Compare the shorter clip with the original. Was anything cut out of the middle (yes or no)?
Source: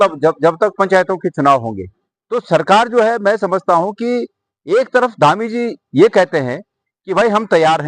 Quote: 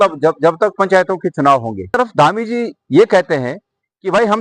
yes